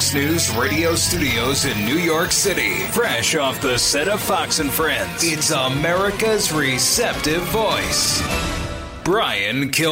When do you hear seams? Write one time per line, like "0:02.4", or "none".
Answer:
none